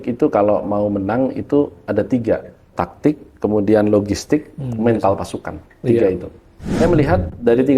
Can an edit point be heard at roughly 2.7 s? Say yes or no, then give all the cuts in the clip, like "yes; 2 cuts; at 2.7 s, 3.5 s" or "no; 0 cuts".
yes; 2 cuts; at 2.7 s, 6.7 s